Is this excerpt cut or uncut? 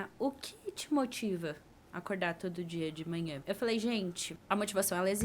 cut